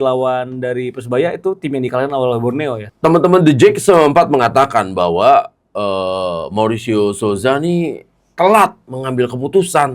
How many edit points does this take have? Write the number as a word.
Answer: one